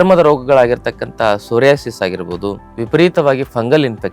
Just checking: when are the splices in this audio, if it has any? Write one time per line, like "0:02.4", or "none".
0:02.7

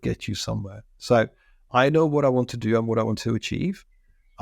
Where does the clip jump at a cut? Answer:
none

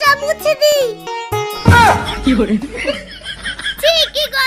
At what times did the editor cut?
0:01.1

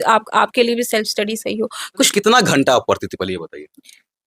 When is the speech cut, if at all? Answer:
0:02.1

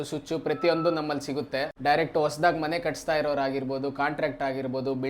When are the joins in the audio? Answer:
0:01.7

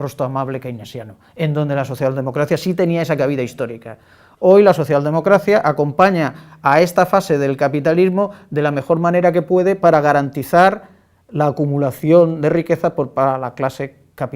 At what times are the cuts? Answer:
0:08.0

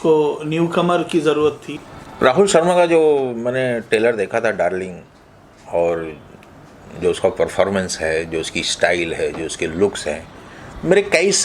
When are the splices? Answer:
0:01.7

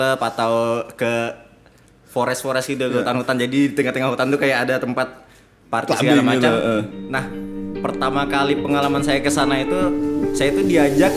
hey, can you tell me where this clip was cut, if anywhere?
none

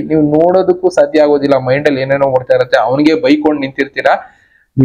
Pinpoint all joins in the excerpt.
none

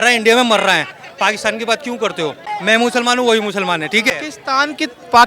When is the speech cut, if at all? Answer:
0:02.5
0:04.1

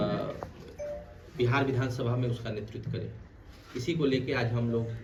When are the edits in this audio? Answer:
none

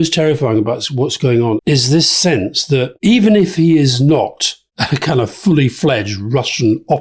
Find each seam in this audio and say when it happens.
0:01.6
0:02.9

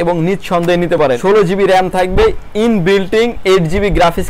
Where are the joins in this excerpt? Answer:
0:01.2

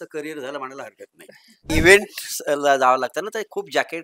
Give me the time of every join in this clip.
0:01.7

